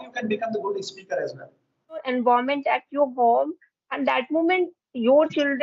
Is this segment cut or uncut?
cut